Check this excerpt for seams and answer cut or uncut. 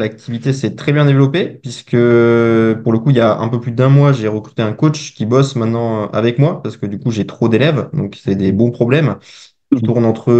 uncut